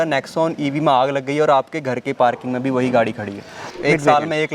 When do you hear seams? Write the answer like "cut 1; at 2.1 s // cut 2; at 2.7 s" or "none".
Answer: cut 1; at 3.6 s